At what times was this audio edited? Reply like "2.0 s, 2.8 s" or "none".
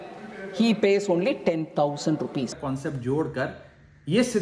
2.6 s